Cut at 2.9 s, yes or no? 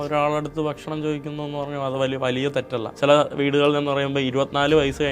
yes